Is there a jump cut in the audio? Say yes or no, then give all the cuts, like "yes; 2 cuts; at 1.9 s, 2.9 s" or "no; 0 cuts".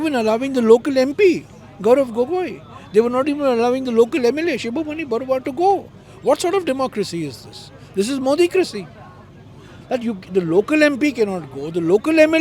no; 0 cuts